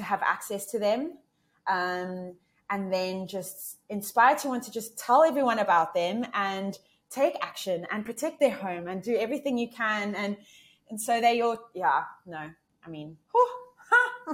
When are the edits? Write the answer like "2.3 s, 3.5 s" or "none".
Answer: none